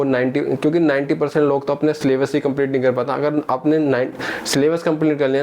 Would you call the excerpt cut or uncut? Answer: uncut